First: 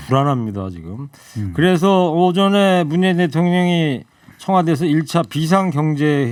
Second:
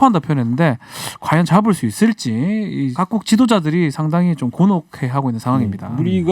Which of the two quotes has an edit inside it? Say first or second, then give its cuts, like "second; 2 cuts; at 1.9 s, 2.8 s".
second; 1 cut; at 2.9 s